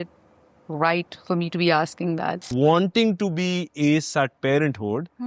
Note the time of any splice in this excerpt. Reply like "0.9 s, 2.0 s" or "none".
2.5 s